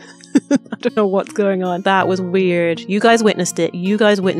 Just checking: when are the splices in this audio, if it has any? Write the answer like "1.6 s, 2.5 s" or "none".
1.8 s